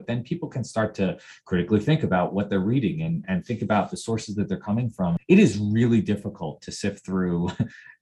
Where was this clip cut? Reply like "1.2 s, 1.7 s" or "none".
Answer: 5.2 s